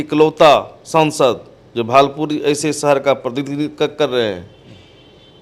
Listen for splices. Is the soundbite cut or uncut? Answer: uncut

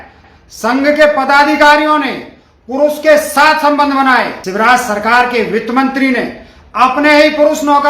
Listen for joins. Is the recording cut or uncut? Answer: cut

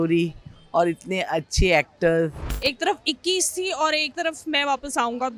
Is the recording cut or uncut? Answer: cut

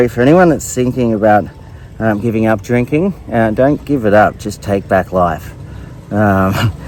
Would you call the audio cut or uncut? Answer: uncut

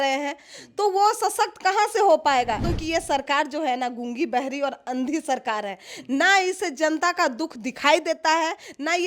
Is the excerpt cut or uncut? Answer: cut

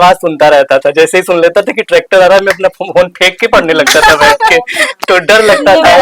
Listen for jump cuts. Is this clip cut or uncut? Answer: uncut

